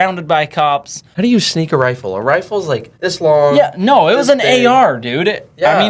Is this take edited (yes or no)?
yes